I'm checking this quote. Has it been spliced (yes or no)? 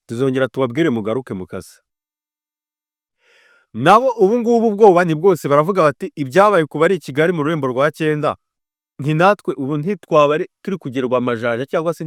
no